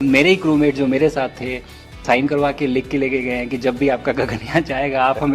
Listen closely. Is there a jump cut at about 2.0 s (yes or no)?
yes